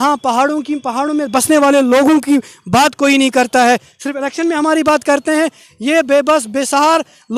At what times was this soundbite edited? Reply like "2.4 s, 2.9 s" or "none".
none